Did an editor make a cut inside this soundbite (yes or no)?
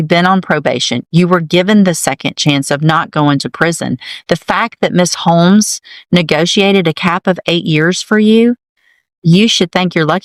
no